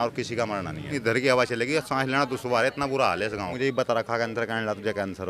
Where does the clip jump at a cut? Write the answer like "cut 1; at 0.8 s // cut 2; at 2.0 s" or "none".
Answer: cut 1; at 1.0 s // cut 2; at 3.5 s